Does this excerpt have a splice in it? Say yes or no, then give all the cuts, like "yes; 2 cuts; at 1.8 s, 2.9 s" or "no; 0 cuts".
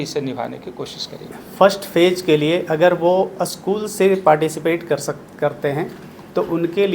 yes; 1 cut; at 1.4 s